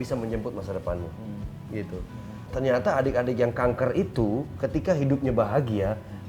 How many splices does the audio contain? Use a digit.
1